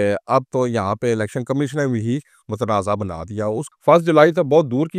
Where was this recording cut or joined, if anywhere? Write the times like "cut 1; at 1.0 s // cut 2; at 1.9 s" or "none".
cut 1; at 3.7 s